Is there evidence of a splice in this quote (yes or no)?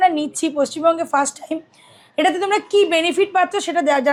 no